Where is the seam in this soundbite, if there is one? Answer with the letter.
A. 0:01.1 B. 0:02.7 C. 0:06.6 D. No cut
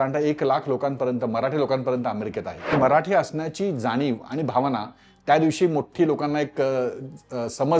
B